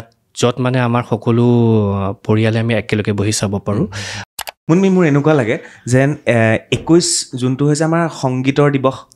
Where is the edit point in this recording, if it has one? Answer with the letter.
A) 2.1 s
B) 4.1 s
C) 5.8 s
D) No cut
B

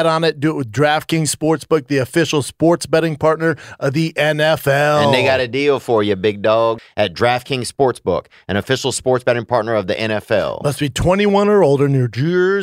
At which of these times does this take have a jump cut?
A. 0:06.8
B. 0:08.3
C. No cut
A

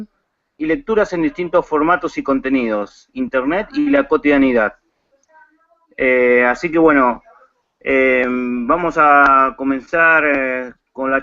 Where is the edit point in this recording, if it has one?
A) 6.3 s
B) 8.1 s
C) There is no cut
A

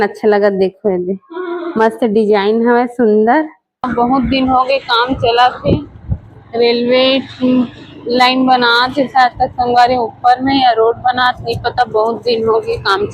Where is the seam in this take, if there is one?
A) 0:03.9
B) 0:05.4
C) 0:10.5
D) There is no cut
A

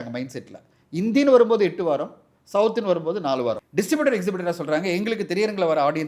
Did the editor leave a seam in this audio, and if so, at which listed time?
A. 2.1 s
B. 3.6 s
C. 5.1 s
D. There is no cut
B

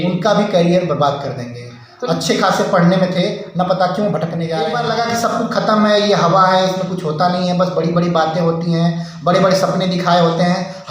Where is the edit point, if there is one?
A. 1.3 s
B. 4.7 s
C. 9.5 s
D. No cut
B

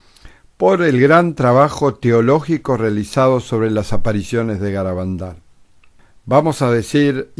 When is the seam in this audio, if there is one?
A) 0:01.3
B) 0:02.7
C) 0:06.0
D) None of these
A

